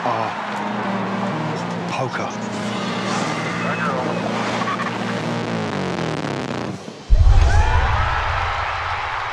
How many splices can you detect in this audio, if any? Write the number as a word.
one